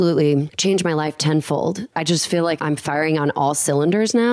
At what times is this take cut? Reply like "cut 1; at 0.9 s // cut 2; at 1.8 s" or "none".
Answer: cut 1; at 1.9 s